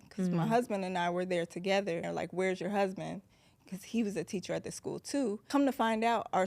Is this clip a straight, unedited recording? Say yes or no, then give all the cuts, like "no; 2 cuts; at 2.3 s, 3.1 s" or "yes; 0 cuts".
no; 2 cuts; at 2.1 s, 5.4 s